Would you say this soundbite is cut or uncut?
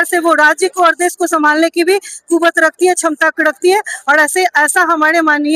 uncut